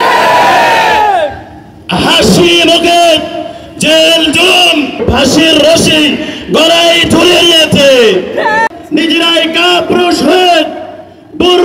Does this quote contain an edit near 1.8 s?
no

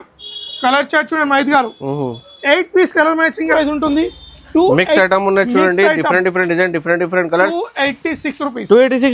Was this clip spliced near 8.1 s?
no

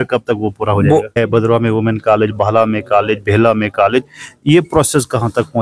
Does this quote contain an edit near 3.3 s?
no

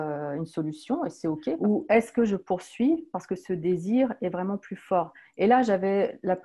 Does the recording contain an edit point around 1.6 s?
yes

